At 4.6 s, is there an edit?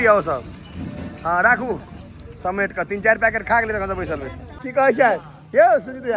yes; 1 cut; at 4.6 s

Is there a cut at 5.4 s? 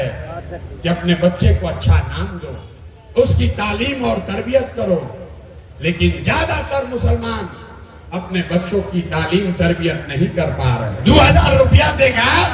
no; 1 cut; at 10.9 s

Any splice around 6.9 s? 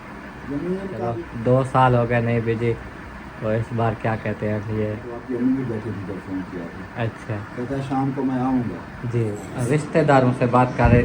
no; 3 cuts; at 1.1 s, 5.1 s, 9.4 s

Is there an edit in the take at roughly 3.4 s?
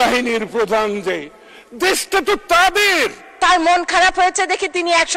yes; 1 cut; at 3.4 s

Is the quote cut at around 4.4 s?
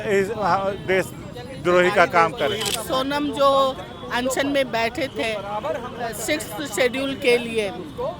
no; 1 cut; at 2.7 s

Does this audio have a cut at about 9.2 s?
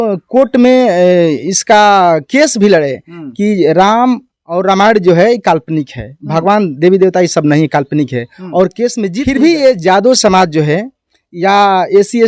yes; 1 cut; at 9.2 s

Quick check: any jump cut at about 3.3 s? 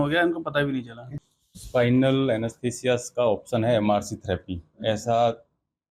no; 1 cut; at 1.2 s

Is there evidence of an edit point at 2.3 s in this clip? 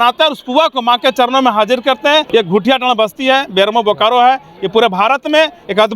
yes; 1 cut; at 2.3 s

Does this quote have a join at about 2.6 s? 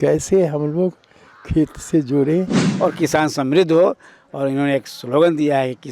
yes; 1 cut; at 2.6 s

